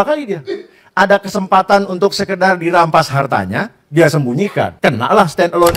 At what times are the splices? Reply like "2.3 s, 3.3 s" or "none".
4.7 s